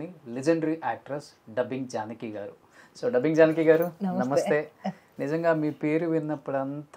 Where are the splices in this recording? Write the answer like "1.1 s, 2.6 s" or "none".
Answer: none